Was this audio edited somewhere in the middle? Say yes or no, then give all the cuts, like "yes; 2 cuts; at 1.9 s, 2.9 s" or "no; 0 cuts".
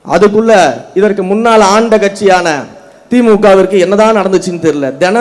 no; 0 cuts